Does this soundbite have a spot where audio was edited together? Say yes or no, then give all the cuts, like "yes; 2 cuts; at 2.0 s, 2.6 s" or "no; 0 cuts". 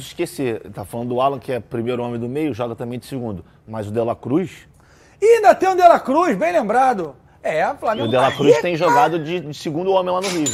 no; 0 cuts